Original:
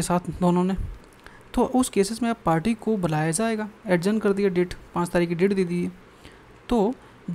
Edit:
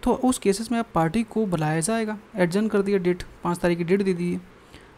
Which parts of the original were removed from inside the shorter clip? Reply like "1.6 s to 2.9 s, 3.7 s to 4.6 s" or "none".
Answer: none